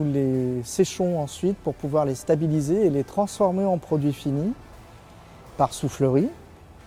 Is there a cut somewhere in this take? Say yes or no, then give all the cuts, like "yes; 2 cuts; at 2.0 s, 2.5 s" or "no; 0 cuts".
no; 0 cuts